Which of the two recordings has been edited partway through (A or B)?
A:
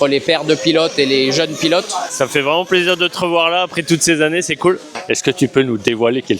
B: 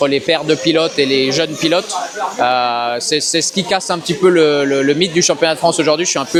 A